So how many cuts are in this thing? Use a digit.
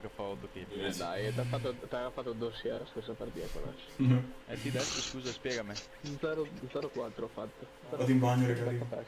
2